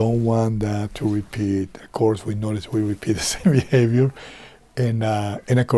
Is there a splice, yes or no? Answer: no